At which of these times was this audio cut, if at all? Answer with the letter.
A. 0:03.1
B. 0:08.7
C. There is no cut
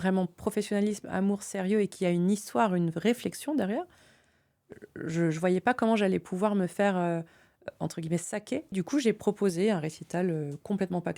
B